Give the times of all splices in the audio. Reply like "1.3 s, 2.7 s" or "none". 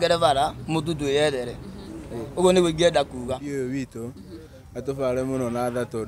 3.4 s